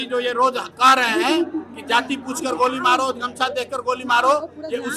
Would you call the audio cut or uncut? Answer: uncut